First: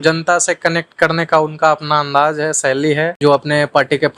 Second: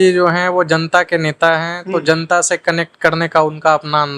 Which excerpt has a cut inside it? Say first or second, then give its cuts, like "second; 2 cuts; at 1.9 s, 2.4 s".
first; 1 cut; at 3.2 s